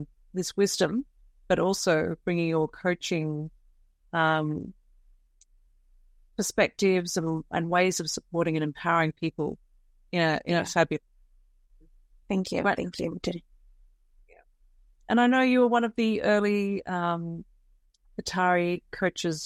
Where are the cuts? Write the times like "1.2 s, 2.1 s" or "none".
none